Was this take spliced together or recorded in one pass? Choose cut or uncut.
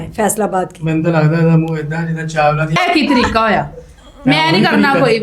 cut